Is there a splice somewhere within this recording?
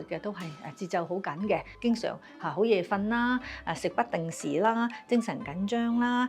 yes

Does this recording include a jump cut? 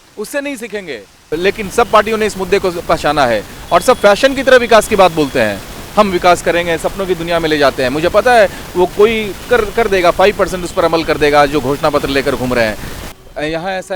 yes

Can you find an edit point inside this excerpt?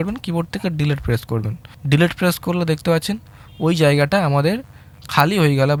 no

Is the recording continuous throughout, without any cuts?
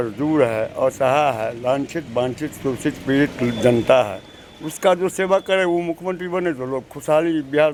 yes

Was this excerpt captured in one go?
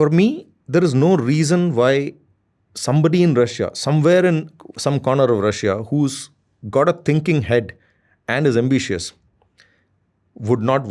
yes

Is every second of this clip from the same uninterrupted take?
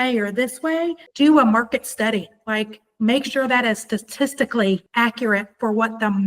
no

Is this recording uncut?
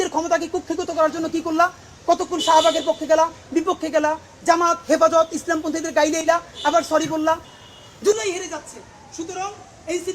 no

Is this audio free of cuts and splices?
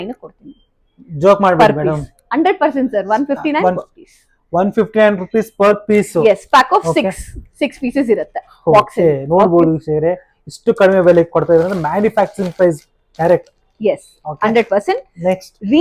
yes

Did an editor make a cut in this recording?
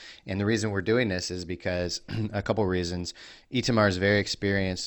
no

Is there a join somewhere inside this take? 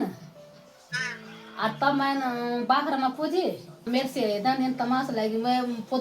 yes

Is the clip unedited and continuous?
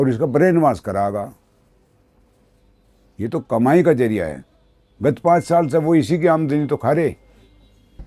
yes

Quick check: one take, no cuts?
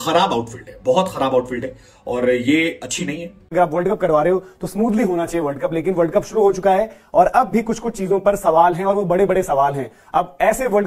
no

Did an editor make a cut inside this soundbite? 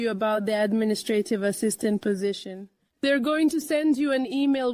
no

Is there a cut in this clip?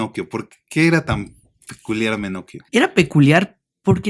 yes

